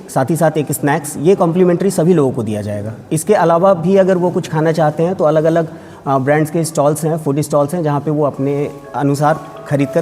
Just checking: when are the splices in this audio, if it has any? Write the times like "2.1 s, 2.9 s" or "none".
none